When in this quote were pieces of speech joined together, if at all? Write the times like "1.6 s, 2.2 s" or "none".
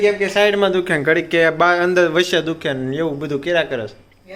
none